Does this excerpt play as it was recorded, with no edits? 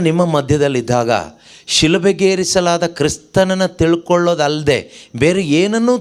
yes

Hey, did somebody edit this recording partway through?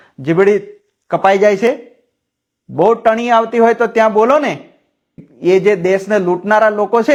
no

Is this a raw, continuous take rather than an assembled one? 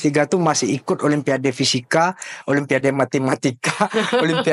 yes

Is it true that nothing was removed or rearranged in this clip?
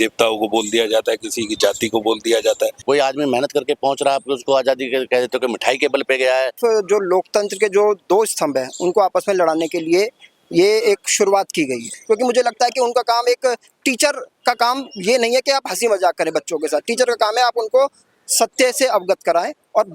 no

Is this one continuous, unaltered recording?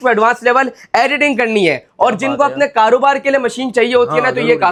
yes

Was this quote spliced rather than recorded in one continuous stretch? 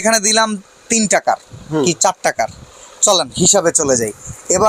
no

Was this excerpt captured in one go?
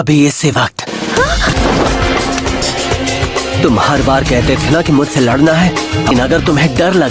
no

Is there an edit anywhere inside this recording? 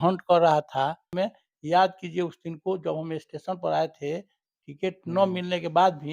yes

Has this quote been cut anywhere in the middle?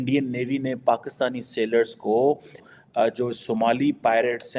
yes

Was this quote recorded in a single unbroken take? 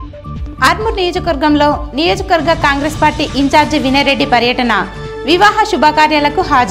yes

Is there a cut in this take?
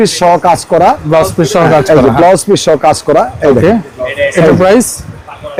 no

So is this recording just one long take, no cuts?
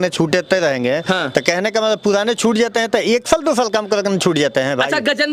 yes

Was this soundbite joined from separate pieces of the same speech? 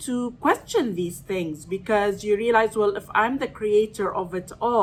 no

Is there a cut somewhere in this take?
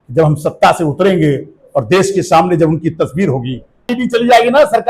yes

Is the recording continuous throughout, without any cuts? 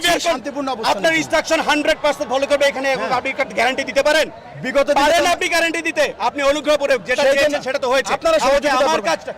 yes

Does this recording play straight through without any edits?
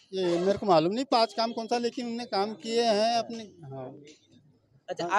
yes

